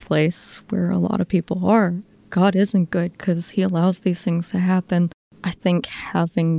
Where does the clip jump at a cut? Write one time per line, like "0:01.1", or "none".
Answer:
0:05.2